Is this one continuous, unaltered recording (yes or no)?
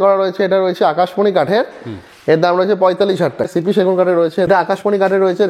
no